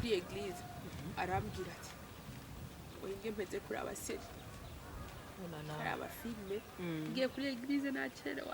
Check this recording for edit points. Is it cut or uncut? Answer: uncut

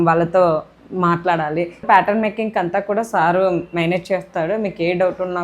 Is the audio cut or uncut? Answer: cut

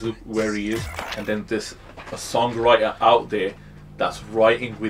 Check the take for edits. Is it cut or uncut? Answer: cut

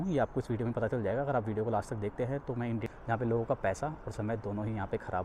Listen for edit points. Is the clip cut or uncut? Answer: cut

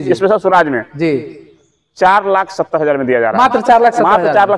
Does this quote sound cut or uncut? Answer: uncut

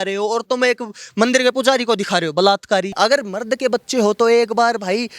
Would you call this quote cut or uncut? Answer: cut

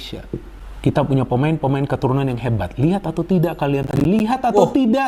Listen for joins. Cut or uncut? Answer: uncut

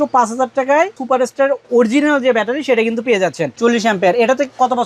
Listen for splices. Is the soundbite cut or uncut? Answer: cut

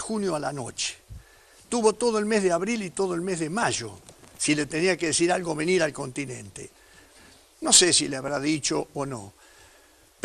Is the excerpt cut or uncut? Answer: cut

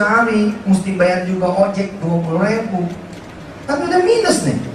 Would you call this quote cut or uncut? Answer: uncut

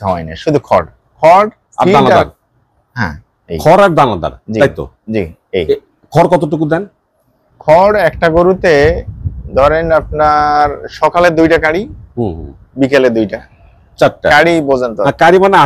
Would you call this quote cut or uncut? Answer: uncut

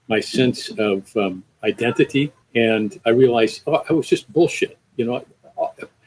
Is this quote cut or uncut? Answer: cut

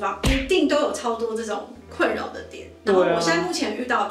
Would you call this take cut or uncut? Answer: uncut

